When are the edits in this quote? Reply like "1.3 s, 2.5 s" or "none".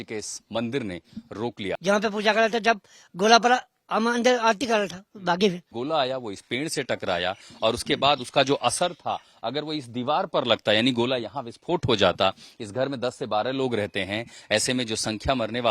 1.7 s, 5.7 s